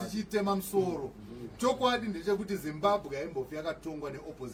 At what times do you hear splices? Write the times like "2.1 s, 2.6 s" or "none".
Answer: none